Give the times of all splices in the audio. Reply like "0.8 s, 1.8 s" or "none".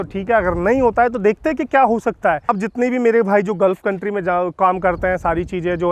2.5 s